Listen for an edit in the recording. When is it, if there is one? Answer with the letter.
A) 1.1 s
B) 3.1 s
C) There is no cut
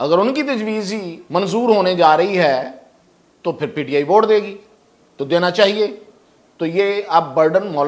A